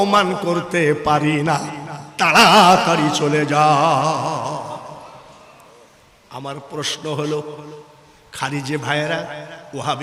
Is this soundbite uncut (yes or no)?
yes